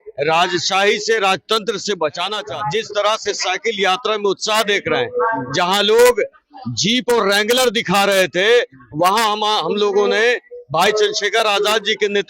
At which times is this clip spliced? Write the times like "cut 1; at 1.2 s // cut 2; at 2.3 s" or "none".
cut 1; at 2.4 s